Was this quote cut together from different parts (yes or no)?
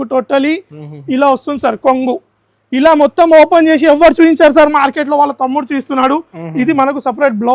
no